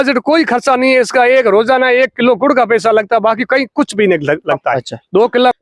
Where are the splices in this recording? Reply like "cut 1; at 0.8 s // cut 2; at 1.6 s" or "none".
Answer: none